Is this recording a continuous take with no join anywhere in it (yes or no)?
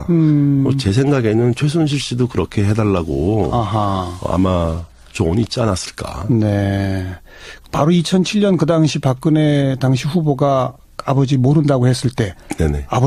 yes